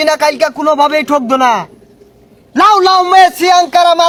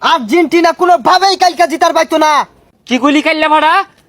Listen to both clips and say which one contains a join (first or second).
second